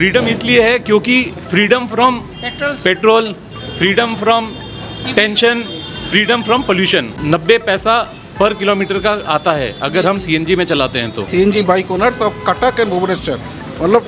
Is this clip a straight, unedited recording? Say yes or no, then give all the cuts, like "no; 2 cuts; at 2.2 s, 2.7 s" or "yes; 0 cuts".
no; 2 cuts; at 7.1 s, 11.2 s